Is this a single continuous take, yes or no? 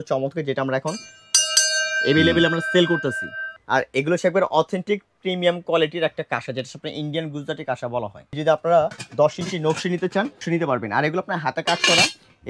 no